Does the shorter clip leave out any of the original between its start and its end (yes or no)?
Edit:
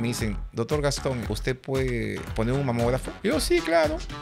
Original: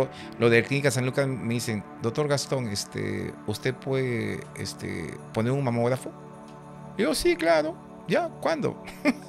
yes